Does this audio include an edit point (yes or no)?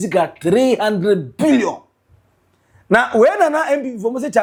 no